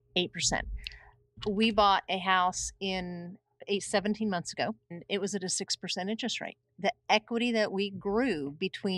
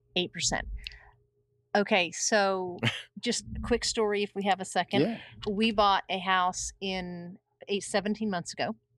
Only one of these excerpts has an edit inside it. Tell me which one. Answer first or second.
first